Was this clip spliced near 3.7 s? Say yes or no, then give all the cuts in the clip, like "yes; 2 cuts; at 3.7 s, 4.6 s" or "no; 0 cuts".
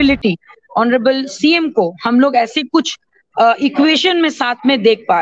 no; 0 cuts